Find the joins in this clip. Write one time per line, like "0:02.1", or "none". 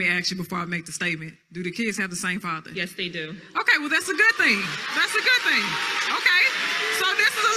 0:06.3